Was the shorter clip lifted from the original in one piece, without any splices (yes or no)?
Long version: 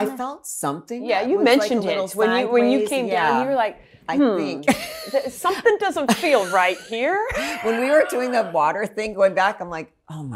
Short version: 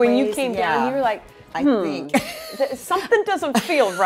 yes